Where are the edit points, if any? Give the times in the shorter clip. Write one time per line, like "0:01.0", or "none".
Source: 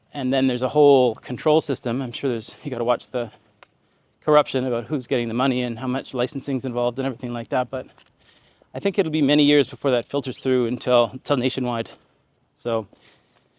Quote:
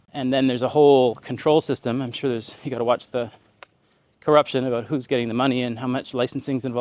none